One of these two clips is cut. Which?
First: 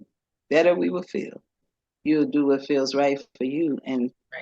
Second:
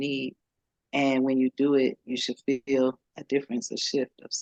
first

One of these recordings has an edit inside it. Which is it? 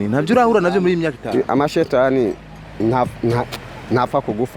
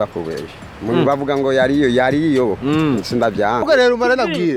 second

